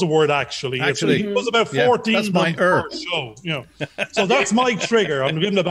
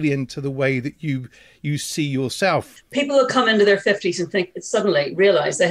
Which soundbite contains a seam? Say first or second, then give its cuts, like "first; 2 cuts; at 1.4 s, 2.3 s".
second; 1 cut; at 2.8 s